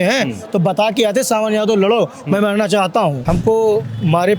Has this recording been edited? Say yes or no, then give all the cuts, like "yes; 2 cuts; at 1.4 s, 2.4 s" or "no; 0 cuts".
yes; 1 cut; at 3.2 s